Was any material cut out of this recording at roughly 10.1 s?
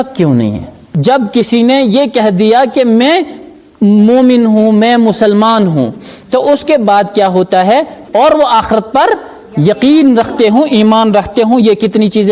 no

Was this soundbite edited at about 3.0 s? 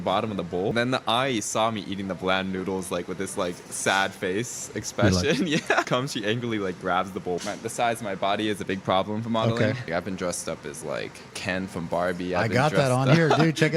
no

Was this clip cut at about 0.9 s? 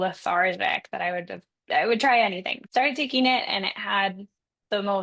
no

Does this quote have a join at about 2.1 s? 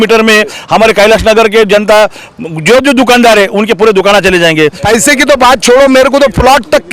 no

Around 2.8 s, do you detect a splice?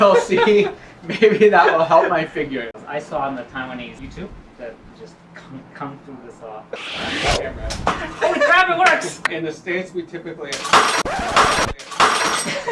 yes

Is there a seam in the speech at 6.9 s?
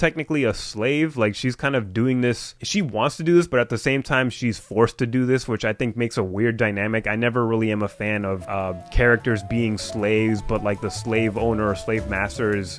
no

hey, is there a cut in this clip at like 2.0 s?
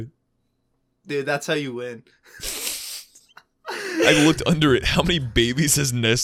no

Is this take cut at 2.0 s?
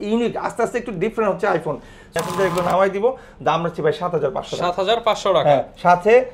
yes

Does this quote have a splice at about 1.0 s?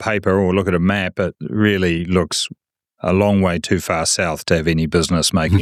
no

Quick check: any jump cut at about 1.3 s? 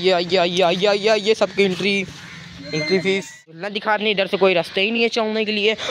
no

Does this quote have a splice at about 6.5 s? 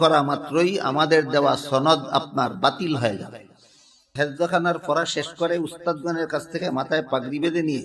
no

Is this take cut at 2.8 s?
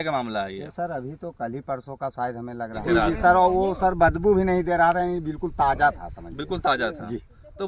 yes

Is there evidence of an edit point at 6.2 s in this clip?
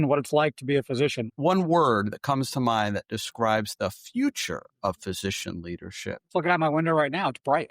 yes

